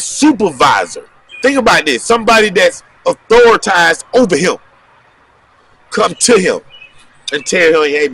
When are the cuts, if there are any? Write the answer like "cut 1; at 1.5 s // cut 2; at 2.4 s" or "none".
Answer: cut 1; at 1.2 s